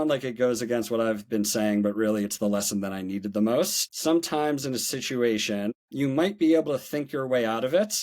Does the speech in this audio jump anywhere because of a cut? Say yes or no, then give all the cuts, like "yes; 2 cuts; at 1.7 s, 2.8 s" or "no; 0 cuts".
yes; 2 cuts; at 3.8 s, 5.7 s